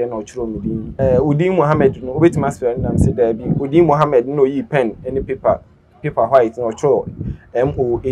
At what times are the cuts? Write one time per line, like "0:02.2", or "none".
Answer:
0:00.9